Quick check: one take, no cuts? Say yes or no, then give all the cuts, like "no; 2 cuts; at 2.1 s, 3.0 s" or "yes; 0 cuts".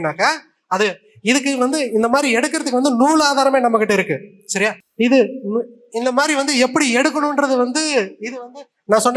yes; 0 cuts